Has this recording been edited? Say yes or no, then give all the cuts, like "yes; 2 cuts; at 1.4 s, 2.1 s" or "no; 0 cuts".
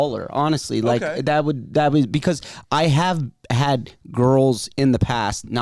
no; 0 cuts